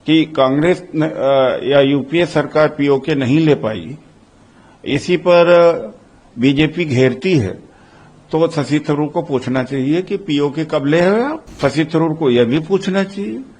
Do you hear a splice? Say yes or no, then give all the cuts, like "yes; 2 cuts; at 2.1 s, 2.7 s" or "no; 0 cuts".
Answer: yes; 1 cut; at 11.5 s